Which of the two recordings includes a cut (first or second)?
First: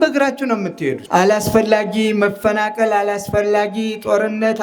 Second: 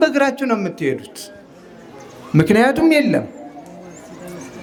first